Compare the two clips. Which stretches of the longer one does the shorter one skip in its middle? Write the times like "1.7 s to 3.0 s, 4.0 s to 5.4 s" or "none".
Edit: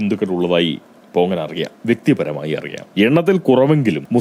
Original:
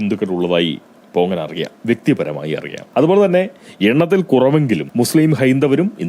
2.8 s to 3.6 s